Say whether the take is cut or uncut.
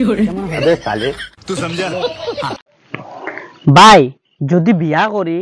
cut